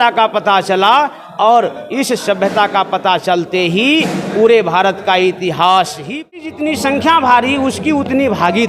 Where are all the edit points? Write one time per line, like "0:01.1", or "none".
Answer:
0:06.4